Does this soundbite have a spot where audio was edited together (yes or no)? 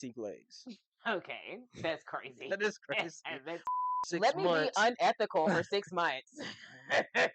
yes